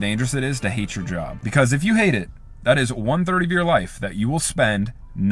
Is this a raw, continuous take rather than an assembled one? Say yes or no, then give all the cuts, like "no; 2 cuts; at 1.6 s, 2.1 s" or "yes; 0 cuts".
yes; 0 cuts